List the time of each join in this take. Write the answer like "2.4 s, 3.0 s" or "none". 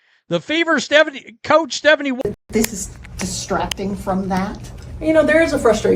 2.2 s